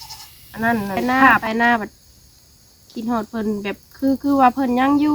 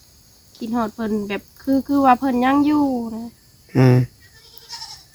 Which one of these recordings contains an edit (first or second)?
first